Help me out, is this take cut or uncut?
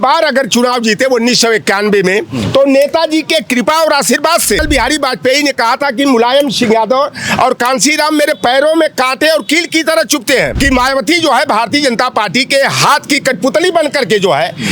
cut